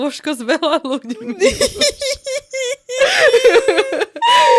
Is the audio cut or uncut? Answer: uncut